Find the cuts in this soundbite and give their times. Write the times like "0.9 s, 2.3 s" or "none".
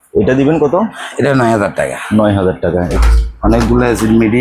2.9 s